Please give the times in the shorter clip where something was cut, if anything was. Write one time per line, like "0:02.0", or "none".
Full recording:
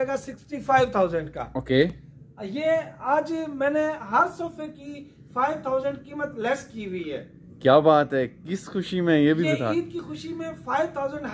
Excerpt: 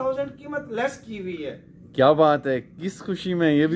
none

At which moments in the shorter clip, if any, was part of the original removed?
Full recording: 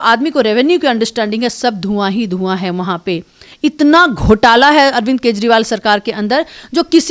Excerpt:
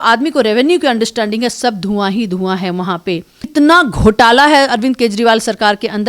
0:03.5

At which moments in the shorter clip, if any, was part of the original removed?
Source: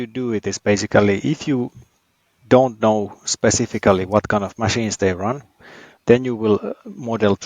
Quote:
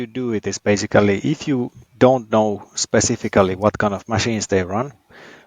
0:01.8

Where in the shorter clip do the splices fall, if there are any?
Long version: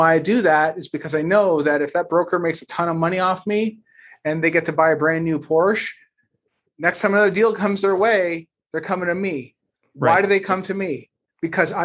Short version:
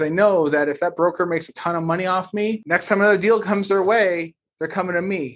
0:02.6

